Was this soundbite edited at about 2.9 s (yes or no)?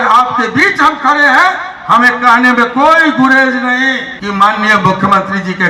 no